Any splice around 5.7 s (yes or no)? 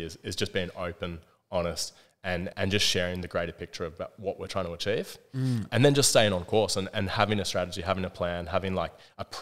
yes